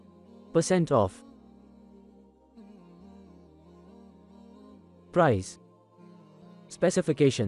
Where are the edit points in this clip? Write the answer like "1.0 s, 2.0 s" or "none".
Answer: none